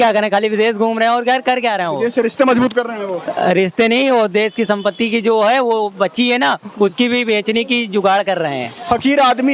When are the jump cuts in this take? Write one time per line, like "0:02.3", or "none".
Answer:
none